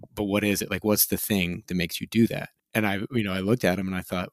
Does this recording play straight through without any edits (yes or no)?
yes